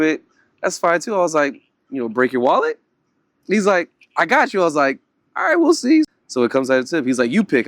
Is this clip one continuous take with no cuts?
no; 1 cut; at 6.2 s

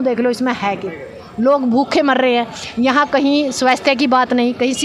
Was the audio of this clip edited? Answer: no; 0 cuts

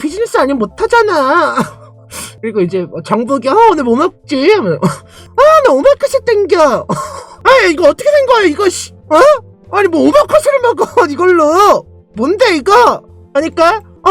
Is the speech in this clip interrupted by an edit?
yes; 2 cuts; at 5.2 s, 7.3 s

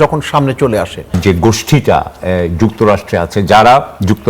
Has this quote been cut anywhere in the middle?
yes; 1 cut; at 1.2 s

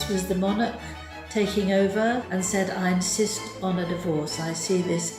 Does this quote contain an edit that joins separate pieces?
yes; 1 cut; at 2.2 s

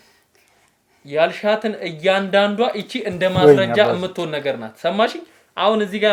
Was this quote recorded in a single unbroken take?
yes; 0 cuts

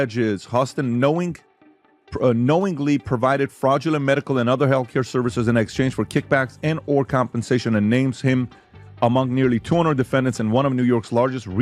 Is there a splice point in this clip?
no; 0 cuts

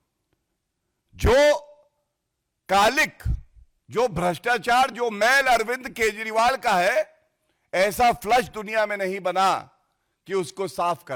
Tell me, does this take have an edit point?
no; 0 cuts

